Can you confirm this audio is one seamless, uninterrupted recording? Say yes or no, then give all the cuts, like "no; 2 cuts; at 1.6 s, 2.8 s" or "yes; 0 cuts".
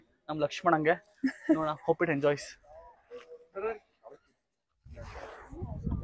yes; 0 cuts